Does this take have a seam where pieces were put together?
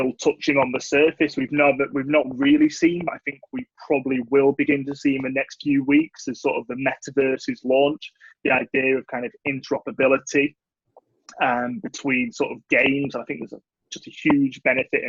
no; 0 cuts

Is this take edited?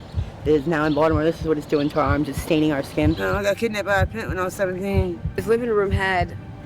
yes; 2 cuts; at 3.2 s, 5.4 s

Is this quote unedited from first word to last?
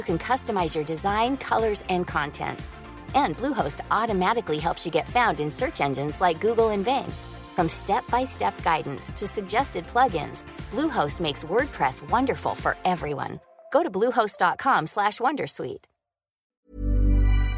no; 1 cut; at 16.5 s

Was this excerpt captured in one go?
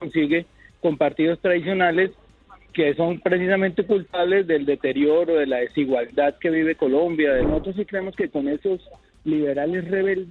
no; 1 cut; at 7.4 s

